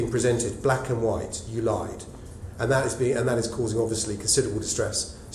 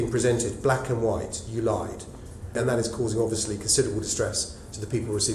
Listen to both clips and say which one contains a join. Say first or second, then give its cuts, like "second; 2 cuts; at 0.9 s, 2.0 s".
second; 1 cut; at 2.6 s